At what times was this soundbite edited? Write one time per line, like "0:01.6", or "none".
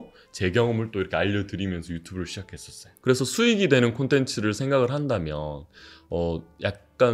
0:02.9